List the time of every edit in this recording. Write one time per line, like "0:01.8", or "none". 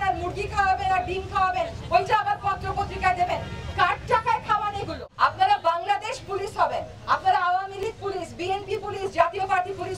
0:04.9

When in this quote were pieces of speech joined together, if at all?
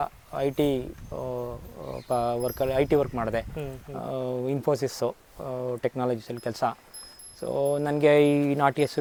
none

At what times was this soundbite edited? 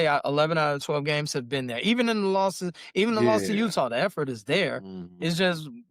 none

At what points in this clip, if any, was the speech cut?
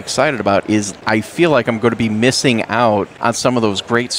0:01.0
0:03.1

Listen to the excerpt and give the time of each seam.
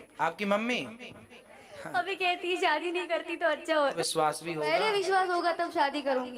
0:04.0

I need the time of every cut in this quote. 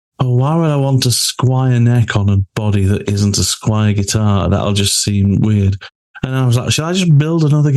none

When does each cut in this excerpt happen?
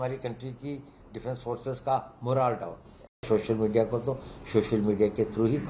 0:03.2

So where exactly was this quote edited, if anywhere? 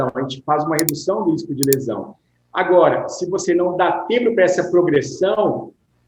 none

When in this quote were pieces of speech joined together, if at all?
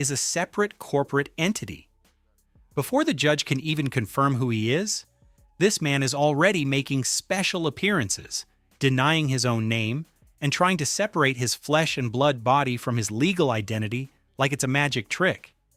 none

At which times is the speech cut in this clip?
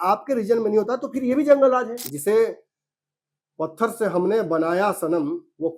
0:02.0

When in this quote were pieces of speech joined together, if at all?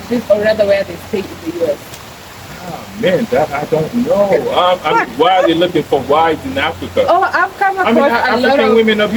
none

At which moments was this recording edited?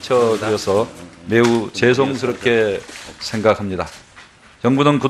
0:02.2

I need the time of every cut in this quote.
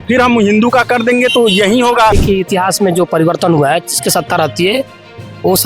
0:02.2

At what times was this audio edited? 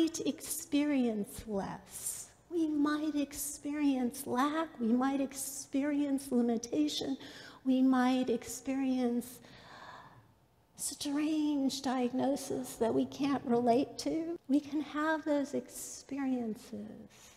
0:14.4

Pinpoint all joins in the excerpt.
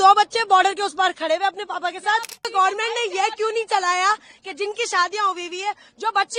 0:02.5

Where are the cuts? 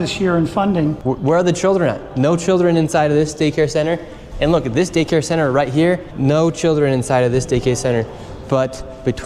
0:01.0

